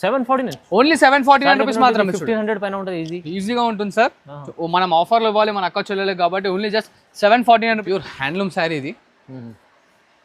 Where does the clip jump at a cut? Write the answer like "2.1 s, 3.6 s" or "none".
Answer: 7.8 s